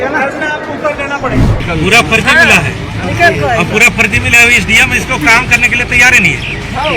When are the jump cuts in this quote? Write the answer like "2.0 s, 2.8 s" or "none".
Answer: 1.5 s